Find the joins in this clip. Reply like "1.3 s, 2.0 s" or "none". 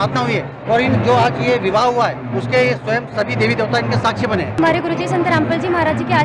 4.6 s